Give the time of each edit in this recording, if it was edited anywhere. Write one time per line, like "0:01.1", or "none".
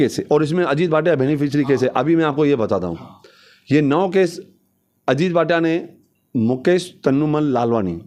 none